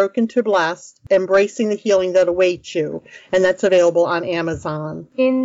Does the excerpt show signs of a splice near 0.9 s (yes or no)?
yes